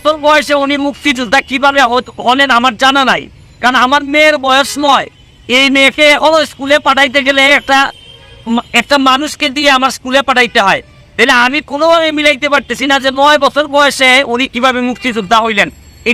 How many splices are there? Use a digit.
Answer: 0